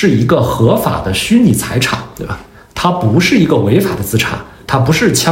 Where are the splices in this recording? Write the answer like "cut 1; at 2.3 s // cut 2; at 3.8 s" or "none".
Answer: none